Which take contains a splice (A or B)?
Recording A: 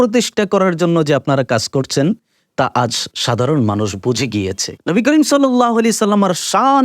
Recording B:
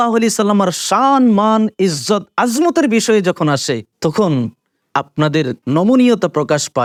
A